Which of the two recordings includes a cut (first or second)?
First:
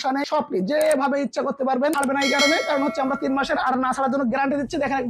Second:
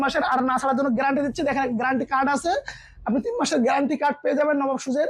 first